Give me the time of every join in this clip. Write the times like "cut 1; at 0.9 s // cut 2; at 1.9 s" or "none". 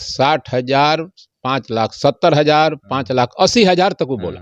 none